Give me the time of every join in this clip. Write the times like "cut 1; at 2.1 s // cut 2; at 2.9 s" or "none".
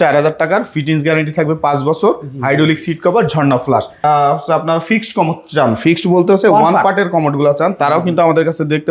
cut 1; at 3.9 s